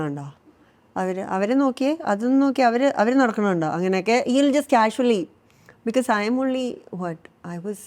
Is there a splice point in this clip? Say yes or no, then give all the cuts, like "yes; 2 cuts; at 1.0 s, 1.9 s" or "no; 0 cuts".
no; 0 cuts